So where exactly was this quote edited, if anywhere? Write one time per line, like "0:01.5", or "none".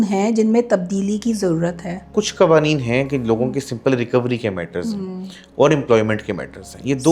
0:02.1